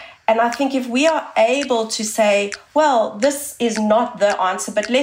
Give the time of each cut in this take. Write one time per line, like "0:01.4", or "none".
none